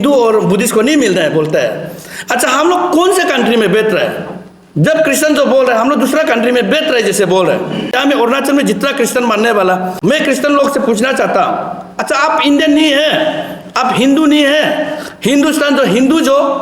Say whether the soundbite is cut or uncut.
cut